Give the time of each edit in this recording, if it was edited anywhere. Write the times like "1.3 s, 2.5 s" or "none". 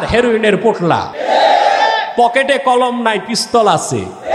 1.1 s